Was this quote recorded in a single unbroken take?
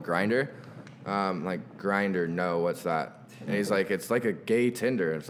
yes; 0 cuts

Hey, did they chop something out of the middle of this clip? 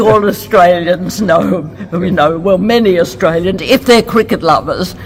no; 0 cuts

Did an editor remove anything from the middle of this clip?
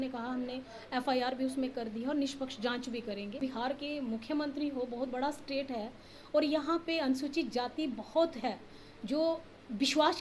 yes; 1 cut; at 3.4 s

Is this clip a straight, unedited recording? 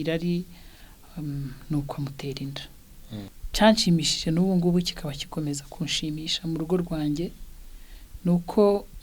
no; 1 cut; at 3.4 s

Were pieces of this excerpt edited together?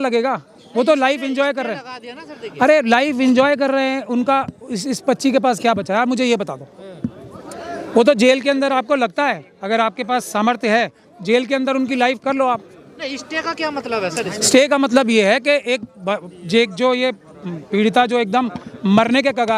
no; 0 cuts

